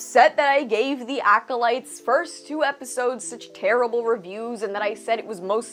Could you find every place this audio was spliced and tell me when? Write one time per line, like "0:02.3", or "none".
none